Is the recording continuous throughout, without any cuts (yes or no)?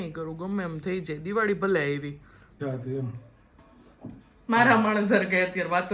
no